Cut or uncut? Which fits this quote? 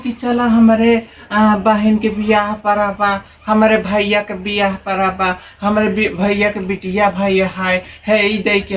uncut